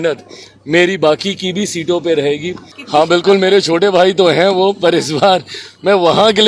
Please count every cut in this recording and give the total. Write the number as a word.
one